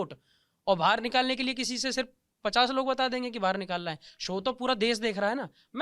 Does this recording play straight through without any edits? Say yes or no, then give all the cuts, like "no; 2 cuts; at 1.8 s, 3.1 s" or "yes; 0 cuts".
yes; 0 cuts